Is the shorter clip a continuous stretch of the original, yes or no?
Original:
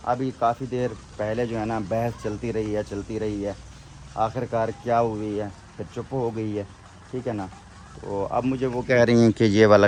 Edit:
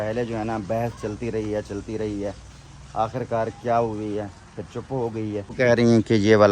no